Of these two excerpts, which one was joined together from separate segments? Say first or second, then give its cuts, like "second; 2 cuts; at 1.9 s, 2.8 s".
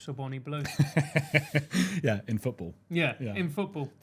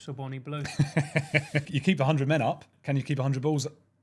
second; 2 cuts; at 1.7 s, 2.7 s